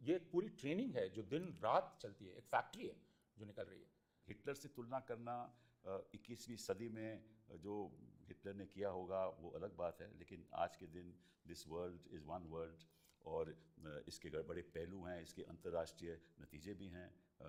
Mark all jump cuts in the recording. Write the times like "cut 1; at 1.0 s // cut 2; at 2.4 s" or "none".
none